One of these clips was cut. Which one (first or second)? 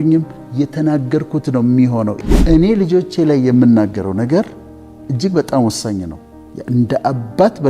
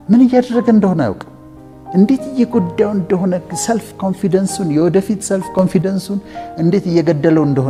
first